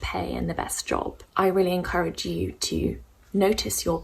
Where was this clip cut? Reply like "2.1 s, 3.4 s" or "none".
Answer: 1.2 s